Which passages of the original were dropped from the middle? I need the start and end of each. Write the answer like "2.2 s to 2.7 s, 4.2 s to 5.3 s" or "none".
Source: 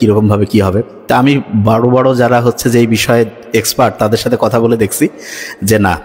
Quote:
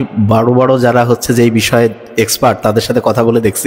none

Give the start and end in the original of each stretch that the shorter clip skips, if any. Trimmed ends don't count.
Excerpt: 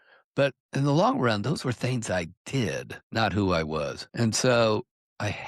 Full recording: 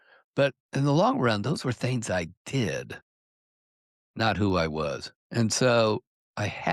3.0 s to 4.0 s, 5.1 s to 5.2 s

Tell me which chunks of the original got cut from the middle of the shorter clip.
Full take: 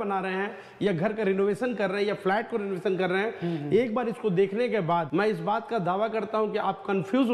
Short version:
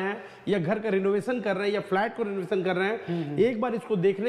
none

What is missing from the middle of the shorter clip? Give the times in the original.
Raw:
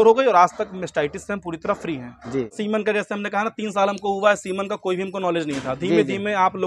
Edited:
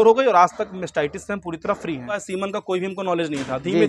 2.2 s to 4.4 s

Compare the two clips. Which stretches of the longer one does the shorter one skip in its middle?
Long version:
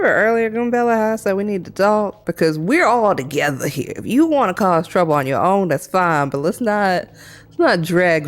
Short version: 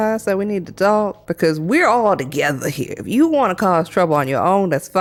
none

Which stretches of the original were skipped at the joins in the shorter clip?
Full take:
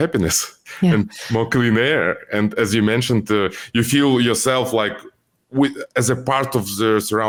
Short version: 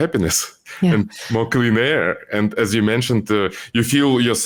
none

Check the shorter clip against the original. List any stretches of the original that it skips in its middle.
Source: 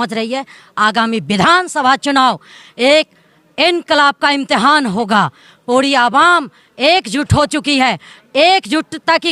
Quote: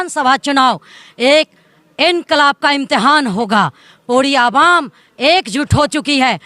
none

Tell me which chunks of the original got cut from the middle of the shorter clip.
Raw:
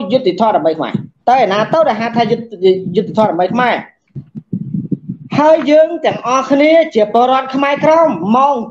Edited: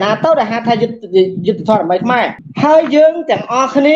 3.9 s to 5.2 s

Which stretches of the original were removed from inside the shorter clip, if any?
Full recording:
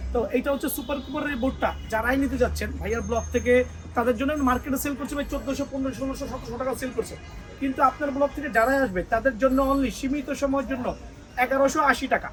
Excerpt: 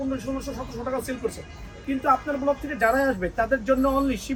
none

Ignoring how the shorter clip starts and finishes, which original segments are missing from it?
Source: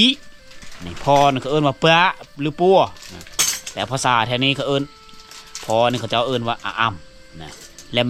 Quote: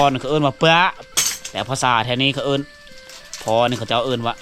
2.3 s to 3.3 s

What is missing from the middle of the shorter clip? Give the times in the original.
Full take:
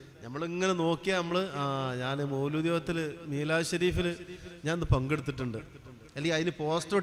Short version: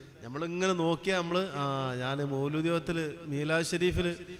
none

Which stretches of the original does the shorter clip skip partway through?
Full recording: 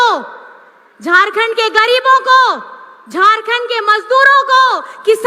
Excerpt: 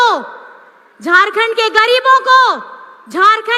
none

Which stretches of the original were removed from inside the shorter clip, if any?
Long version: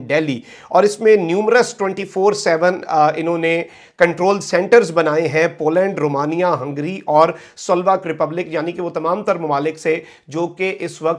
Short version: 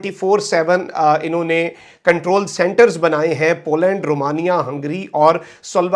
none

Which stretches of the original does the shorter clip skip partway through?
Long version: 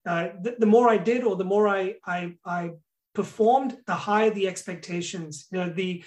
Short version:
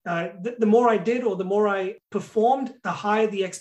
2.0 s to 3.0 s

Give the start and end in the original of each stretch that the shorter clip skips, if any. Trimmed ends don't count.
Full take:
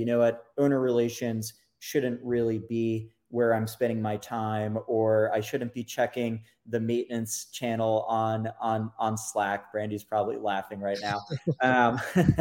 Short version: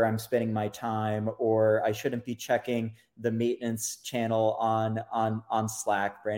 none

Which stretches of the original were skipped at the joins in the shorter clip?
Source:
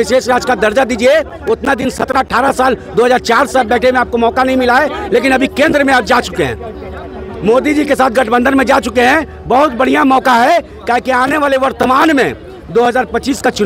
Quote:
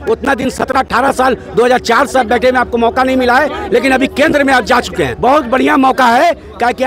6.5 s to 9.4 s

